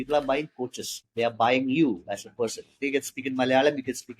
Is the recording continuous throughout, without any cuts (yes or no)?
no